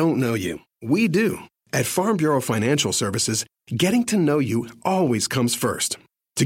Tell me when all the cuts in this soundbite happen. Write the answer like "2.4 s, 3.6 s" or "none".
none